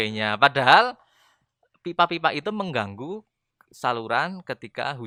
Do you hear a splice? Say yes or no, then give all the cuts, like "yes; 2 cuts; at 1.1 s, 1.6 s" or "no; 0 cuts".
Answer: no; 0 cuts